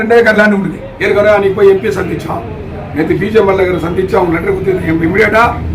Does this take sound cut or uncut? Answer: uncut